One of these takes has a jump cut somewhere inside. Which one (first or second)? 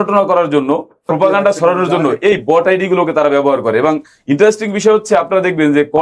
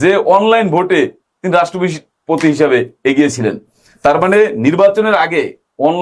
first